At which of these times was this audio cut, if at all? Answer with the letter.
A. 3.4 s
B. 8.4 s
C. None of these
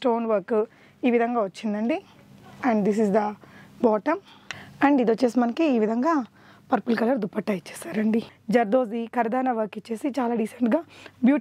B